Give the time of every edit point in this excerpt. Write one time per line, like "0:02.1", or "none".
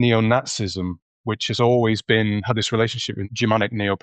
0:03.1